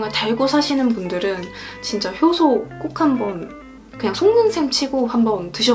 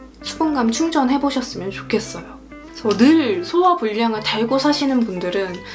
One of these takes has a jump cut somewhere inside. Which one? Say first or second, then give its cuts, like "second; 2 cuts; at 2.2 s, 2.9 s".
second; 1 cut; at 2.6 s